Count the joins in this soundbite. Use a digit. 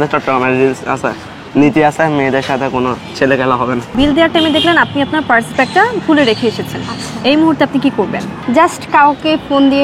2